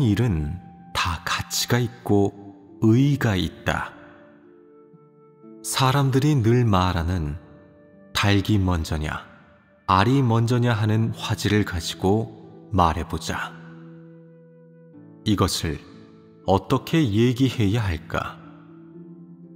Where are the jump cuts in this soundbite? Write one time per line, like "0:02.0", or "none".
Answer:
0:11.5

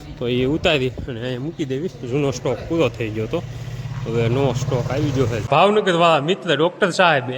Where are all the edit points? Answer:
0:05.5

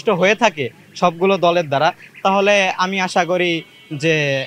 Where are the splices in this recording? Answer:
none

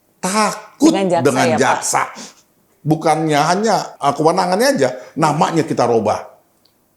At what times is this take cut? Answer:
0:02.7
0:03.9

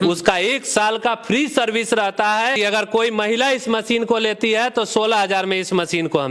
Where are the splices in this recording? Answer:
0:02.6

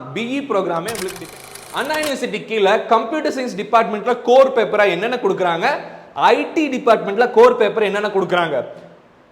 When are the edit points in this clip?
0:01.5

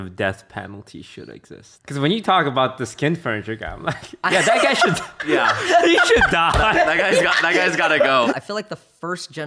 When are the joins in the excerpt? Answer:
0:01.7
0:08.3

